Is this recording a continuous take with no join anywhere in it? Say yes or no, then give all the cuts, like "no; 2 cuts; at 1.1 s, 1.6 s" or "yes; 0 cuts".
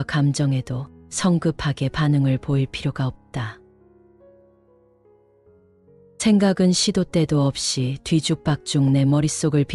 no; 2 cuts; at 4.1 s, 5.8 s